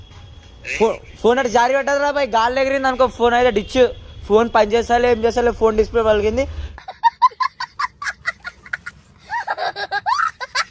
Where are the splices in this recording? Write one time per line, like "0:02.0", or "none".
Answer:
0:06.8